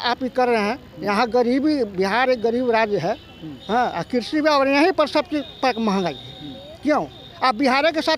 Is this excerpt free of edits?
yes; 0 cuts

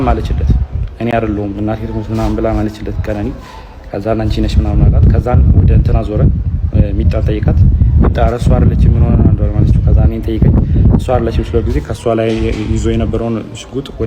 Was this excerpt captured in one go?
yes; 0 cuts

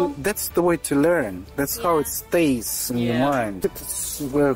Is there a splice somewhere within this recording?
yes; 1 cut; at 3.6 s

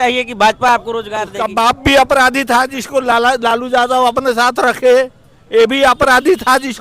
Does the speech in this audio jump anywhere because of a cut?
yes; 1 cut; at 1.2 s

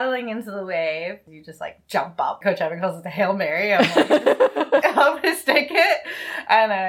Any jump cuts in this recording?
yes; 3 cuts; at 1.3 s, 2.4 s, 4.8 s

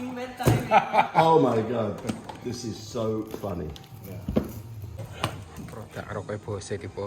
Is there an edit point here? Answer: yes; 1 cut; at 4.9 s

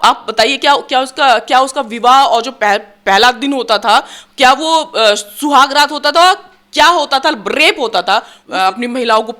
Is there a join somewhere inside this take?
yes; 1 cut; at 8.4 s

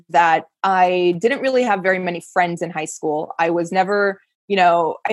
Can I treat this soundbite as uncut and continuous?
yes; 0 cuts

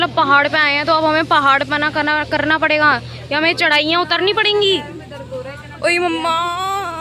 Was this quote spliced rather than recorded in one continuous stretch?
no; 0 cuts

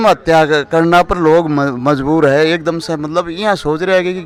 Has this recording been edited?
no; 0 cuts

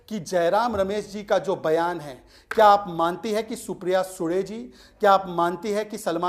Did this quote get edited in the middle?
no; 0 cuts

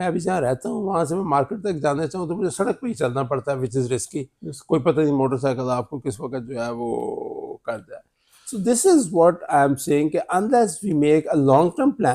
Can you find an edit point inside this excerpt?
no; 0 cuts

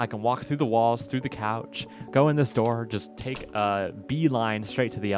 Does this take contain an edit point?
no; 0 cuts

